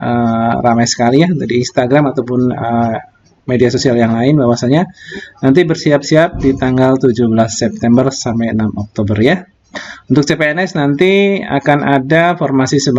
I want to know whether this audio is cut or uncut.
uncut